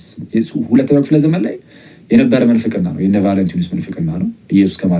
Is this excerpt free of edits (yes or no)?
yes